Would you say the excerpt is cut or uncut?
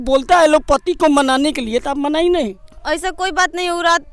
uncut